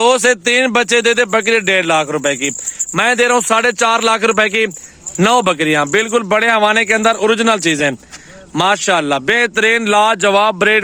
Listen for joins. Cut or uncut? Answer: uncut